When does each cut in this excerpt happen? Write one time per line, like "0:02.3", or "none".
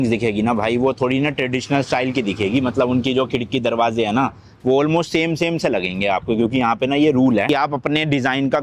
none